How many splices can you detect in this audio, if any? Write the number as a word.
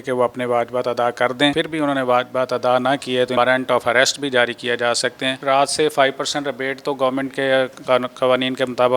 three